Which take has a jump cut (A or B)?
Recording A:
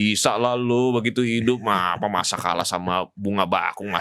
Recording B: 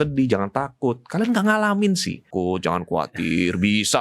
B